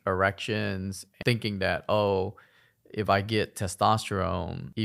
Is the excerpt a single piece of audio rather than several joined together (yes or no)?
no